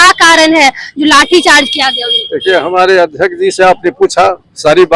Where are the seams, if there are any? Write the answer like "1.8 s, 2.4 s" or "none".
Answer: none